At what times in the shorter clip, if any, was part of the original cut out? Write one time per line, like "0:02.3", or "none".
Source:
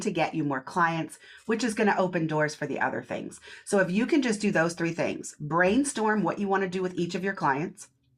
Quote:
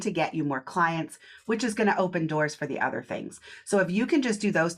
none